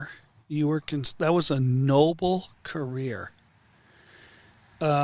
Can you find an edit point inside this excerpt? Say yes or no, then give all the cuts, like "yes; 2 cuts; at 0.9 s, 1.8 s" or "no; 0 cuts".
no; 0 cuts